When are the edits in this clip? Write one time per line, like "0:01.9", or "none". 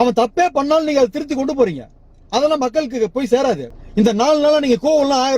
0:03.7